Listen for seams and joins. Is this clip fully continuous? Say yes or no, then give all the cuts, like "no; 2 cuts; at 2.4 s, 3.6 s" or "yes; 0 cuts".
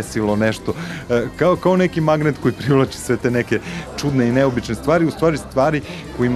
yes; 0 cuts